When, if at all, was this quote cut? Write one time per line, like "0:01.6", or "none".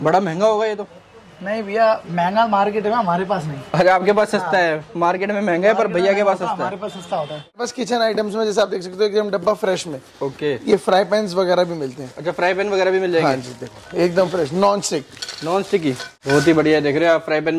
0:07.6
0:16.1